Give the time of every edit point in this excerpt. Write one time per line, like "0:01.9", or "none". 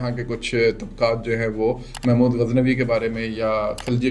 none